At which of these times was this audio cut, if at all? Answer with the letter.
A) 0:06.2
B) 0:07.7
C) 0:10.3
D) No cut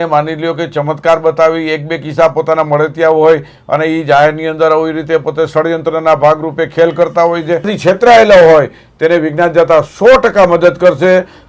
B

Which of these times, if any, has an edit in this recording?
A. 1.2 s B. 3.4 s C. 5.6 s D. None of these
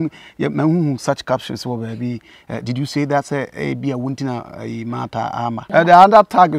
C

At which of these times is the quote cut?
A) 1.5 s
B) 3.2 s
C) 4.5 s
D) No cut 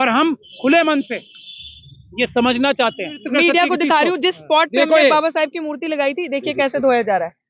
B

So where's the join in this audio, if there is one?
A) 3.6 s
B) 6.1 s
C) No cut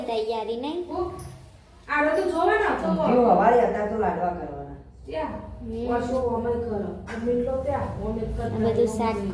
C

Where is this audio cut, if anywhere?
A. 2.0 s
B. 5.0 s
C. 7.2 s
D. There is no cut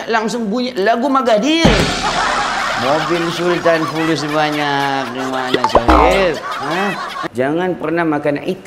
C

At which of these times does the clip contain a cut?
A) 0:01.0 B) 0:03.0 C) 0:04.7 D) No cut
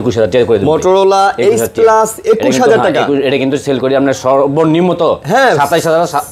D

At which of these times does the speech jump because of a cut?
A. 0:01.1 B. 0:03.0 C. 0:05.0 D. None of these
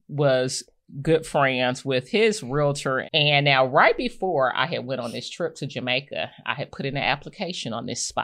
B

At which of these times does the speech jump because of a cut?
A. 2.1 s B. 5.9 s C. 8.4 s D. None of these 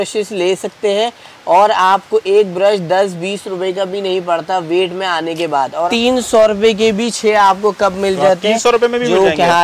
B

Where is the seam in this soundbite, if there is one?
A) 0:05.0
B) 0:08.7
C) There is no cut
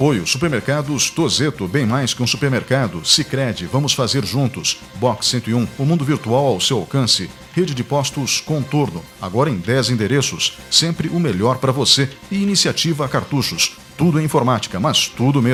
C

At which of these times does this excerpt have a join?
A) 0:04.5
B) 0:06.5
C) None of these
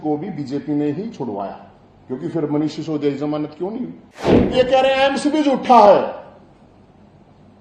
A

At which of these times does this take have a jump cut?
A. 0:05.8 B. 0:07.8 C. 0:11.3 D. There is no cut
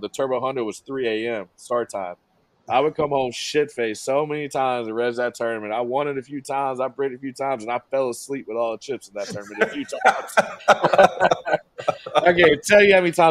D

